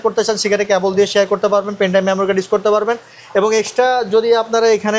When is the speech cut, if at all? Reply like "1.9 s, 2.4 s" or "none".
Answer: none